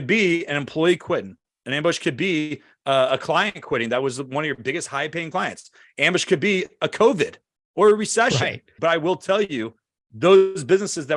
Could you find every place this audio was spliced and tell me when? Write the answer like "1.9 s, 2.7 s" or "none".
8.6 s